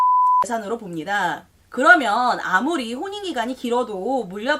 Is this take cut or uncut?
cut